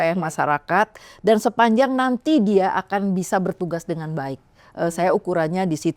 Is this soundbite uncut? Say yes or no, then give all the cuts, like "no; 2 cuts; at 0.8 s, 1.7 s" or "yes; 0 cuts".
yes; 0 cuts